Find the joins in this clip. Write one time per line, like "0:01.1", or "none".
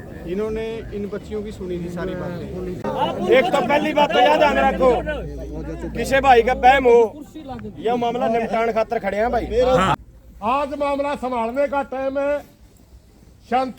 0:02.8
0:09.9